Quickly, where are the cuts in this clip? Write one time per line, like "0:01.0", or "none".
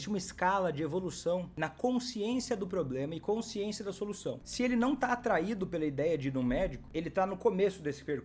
0:01.5
0:04.5
0:06.8